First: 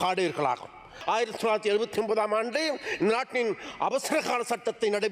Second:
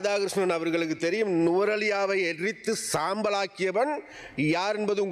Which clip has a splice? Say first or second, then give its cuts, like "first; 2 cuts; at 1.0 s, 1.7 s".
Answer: first; 1 cut; at 0.9 s